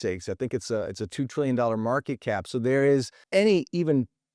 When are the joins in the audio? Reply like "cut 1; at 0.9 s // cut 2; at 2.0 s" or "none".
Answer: cut 1; at 3.2 s